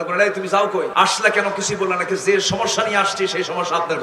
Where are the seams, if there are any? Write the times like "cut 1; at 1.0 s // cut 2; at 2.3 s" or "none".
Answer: cut 1; at 0.9 s